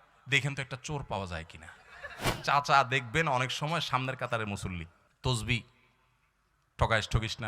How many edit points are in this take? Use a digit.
2